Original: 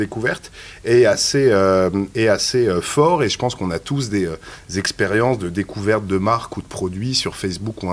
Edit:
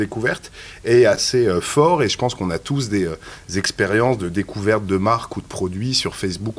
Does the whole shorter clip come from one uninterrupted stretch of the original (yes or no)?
no